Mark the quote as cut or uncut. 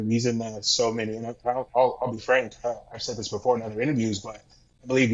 uncut